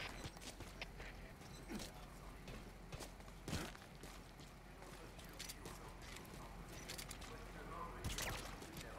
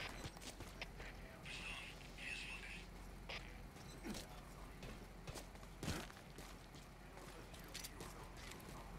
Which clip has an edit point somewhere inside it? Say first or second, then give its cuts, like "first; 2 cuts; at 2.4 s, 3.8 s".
first; 1 cut; at 1.3 s